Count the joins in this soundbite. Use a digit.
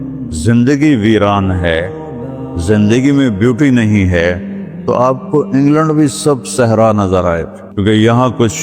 1